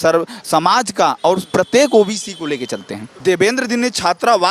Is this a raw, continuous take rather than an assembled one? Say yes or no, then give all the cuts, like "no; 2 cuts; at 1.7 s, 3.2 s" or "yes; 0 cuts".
no; 1 cut; at 3.0 s